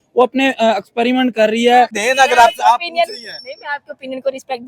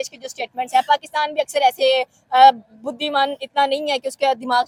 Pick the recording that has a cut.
first; 1 cut; at 2.0 s

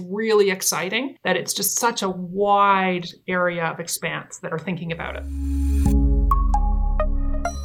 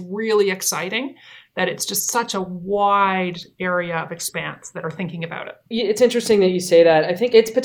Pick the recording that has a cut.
first; 2 cuts; at 1.2 s, 5.2 s

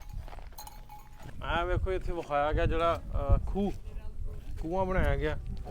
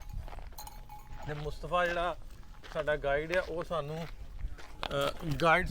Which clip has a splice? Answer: first; 1 cut; at 1.1 s

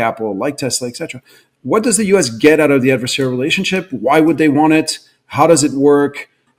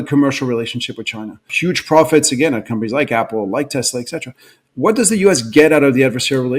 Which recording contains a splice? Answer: second; 1 cut; at 1.5 s

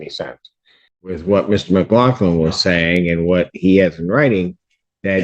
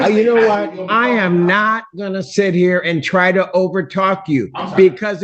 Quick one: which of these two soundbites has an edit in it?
first; 1 cut; at 1.2 s

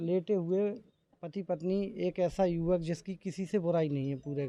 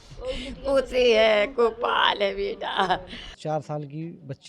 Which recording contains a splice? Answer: second; 1 cut; at 3.3 s

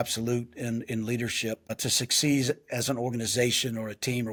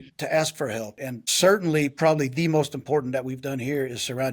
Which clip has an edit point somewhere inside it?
second; 1 cut; at 1.0 s

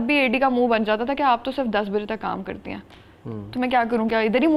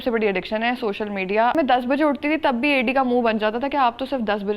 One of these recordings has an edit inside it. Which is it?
second; 1 cut; at 1.5 s

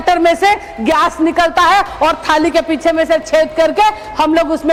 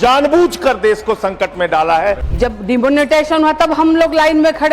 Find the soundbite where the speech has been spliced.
second; 1 cut; at 2.3 s

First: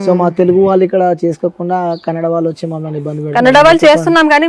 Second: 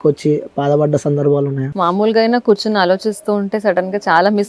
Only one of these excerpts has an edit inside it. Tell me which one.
second; 1 cut; at 1.6 s

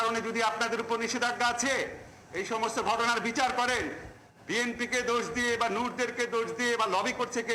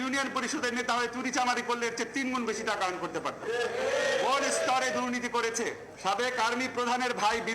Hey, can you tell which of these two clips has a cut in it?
second; 1 cut; at 5.9 s

